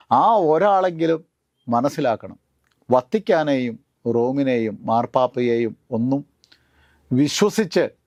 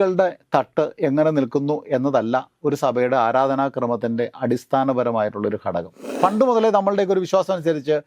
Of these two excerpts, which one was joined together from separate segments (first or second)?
second